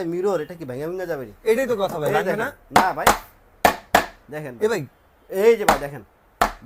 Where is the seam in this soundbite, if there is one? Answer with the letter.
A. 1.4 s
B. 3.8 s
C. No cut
C